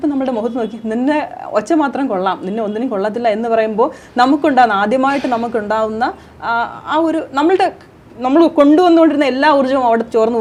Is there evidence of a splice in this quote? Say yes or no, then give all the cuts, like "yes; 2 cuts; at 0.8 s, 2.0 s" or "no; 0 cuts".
no; 0 cuts